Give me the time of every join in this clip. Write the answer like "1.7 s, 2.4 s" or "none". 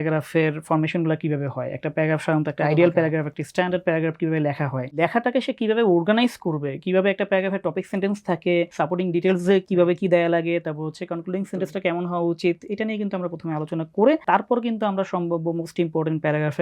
5.0 s, 8.7 s, 14.2 s